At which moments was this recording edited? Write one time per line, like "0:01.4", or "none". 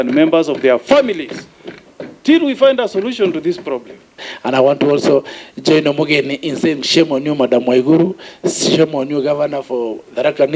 0:04.3